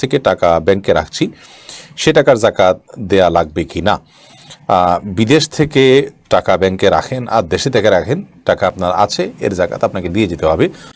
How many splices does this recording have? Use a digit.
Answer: 0